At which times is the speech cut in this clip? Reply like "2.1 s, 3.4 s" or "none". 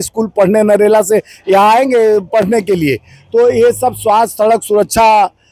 none